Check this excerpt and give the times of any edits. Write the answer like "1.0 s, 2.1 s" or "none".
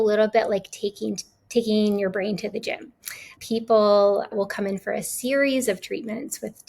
3.3 s, 4.3 s